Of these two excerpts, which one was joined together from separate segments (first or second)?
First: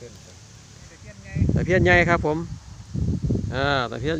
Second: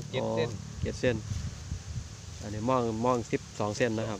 first